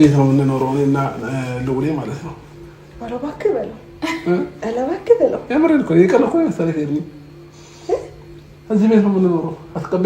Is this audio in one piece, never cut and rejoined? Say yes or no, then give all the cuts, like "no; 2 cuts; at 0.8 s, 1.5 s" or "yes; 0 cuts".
yes; 0 cuts